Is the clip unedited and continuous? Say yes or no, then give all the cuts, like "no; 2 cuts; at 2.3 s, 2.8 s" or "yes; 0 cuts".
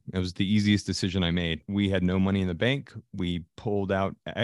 no; 1 cut; at 1.6 s